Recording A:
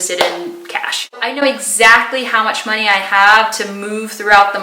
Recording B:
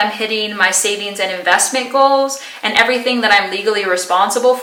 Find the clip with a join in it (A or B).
A